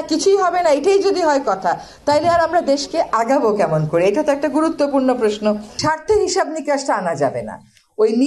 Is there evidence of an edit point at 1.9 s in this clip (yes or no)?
no